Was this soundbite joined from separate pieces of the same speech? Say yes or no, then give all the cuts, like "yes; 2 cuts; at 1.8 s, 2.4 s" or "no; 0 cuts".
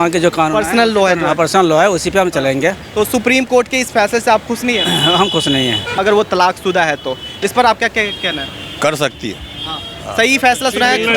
yes; 1 cut; at 5.9 s